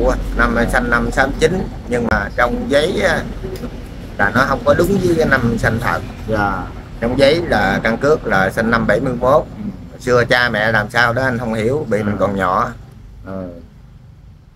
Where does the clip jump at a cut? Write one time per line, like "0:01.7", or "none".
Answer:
none